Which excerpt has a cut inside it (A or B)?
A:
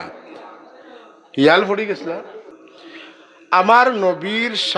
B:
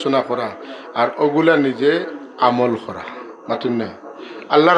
A